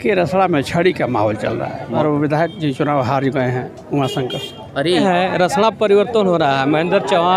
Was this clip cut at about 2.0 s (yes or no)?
yes